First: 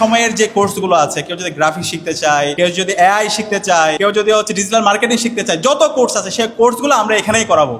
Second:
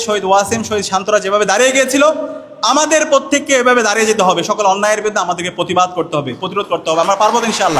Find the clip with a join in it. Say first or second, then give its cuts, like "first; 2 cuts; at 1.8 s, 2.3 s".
first; 2 cuts; at 2.5 s, 4.0 s